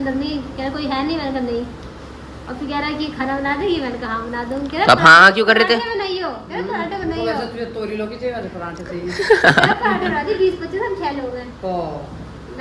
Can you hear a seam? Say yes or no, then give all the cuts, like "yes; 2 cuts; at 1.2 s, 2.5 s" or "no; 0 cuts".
no; 0 cuts